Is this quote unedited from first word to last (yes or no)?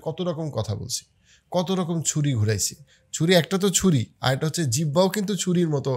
yes